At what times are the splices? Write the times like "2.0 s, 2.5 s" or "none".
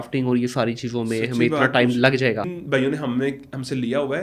2.5 s